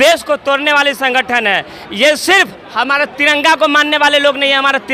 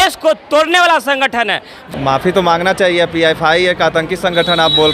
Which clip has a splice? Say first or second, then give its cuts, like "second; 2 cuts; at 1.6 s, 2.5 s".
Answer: second; 1 cut; at 1.8 s